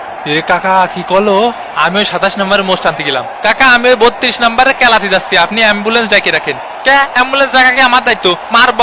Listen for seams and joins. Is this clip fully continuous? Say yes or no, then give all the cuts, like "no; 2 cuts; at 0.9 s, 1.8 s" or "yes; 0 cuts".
yes; 0 cuts